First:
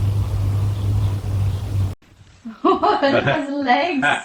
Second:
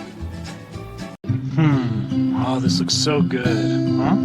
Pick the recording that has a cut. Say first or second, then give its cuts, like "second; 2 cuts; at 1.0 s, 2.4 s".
second; 1 cut; at 1.2 s